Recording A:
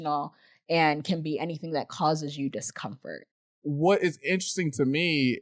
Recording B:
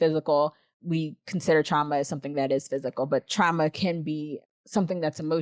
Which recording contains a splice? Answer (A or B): A